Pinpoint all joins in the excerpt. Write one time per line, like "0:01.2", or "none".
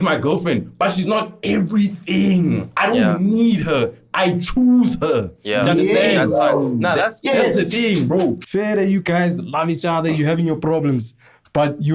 0:08.4